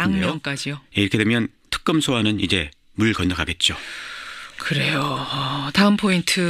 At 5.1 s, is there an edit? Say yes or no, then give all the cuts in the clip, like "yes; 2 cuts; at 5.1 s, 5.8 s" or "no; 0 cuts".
no; 1 cut; at 3.5 s